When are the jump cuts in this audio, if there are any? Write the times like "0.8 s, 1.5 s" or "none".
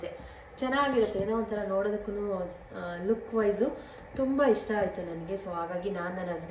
none